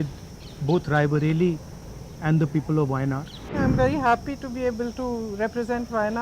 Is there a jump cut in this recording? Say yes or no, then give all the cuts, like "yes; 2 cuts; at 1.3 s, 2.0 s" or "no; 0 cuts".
yes; 1 cut; at 3.6 s